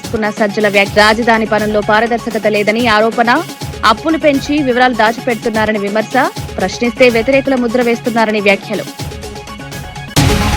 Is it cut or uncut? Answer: uncut